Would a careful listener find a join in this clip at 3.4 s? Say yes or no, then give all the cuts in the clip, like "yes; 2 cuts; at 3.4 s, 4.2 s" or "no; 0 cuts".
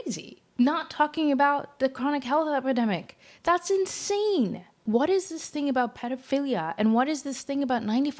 no; 1 cut; at 4.8 s